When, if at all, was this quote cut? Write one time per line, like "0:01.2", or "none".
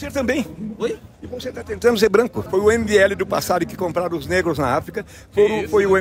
0:02.4